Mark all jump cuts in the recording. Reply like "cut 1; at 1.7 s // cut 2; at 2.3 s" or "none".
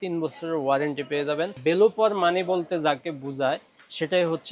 cut 1; at 1.5 s